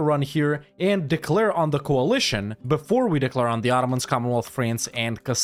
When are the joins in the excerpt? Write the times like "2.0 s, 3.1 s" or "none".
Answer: none